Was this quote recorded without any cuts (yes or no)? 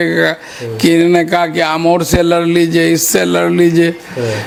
yes